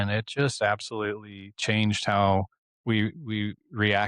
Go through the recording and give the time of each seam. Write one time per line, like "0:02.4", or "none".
none